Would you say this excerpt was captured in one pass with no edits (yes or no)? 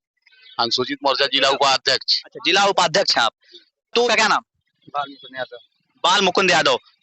no